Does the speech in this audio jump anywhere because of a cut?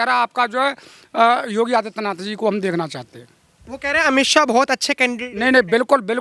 no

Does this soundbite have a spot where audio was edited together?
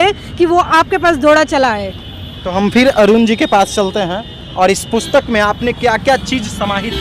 no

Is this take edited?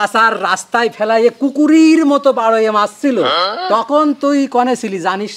yes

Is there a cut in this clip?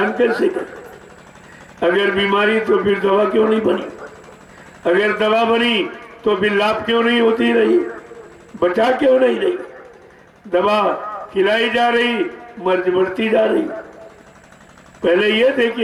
no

